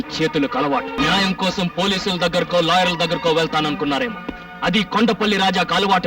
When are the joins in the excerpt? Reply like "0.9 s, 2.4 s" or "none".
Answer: 0.9 s

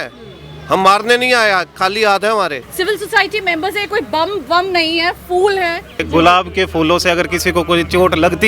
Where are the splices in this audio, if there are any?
2.6 s, 6.0 s

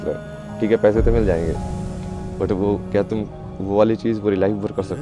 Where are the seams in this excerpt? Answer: none

